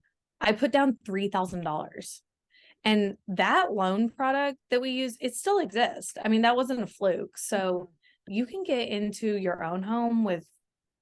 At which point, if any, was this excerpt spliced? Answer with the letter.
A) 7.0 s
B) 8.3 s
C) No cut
B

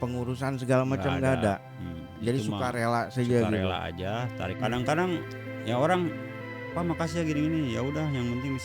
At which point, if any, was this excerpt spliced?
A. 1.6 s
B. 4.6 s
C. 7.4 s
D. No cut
B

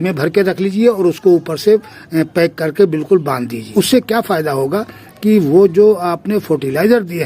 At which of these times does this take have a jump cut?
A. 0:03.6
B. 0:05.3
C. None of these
A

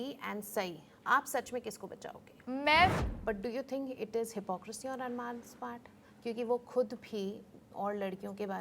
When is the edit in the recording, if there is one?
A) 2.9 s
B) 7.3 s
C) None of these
A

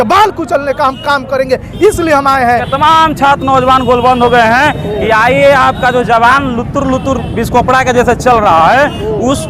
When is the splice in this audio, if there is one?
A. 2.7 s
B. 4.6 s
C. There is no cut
A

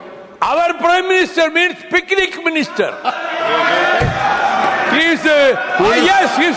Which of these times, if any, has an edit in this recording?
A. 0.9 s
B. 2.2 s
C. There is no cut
C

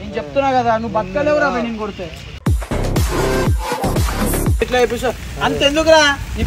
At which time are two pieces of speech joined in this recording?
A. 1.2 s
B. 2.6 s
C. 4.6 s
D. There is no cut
C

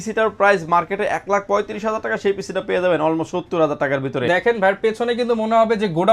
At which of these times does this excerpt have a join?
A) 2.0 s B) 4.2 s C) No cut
B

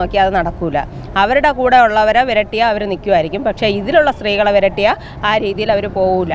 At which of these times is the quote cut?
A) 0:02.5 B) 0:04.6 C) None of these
C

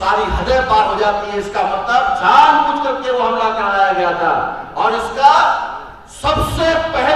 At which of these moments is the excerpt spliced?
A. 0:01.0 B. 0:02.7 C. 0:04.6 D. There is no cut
D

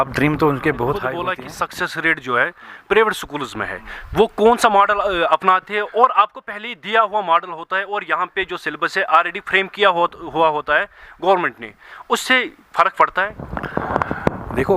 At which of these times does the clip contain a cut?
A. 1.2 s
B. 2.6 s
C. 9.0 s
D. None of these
A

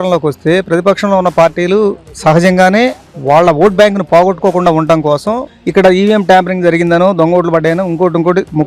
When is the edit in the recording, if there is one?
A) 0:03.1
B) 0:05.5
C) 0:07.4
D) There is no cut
B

